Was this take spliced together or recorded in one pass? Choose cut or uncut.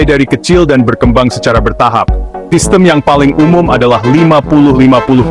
cut